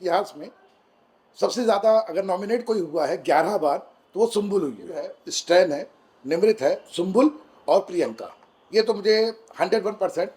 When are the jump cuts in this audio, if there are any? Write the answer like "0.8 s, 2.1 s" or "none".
5.3 s